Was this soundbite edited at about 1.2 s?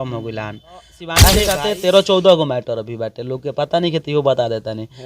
yes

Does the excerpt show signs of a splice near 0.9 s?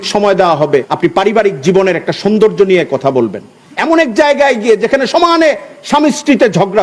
yes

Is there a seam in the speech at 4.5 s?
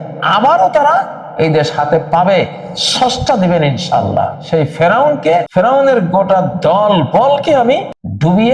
yes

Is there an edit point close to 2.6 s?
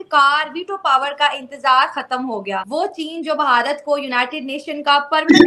yes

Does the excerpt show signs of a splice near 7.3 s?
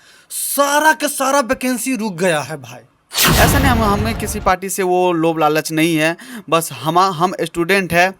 no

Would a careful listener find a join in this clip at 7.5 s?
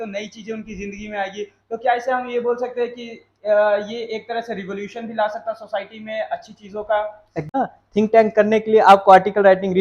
yes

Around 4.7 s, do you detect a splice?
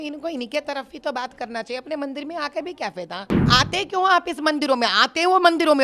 no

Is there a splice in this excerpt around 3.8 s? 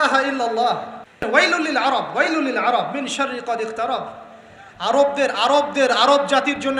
no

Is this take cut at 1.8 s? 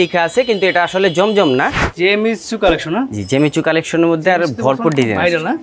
yes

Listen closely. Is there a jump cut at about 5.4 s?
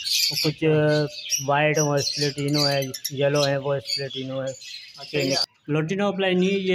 yes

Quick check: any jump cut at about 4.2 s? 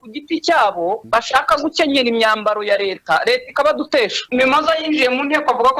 yes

